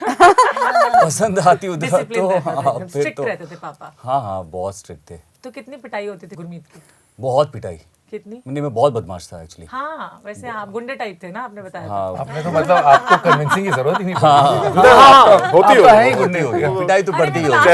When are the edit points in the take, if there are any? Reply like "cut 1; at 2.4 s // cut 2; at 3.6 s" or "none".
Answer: none